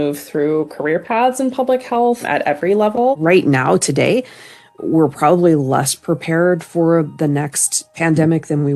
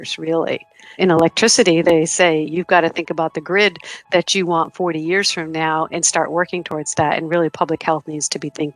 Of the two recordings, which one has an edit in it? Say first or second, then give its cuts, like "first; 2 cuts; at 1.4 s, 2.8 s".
first; 2 cuts; at 2.2 s, 3.2 s